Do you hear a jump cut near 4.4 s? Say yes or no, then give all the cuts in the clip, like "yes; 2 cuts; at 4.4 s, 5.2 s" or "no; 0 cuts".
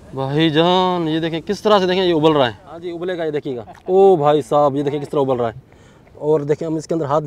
no; 1 cut; at 3.0 s